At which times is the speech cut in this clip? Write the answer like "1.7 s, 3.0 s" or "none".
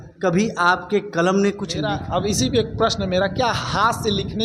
1.7 s